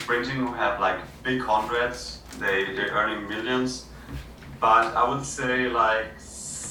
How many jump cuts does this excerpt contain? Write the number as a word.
zero